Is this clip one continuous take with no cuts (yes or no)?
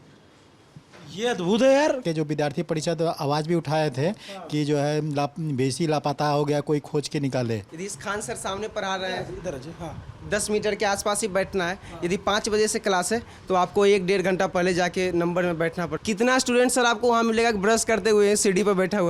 no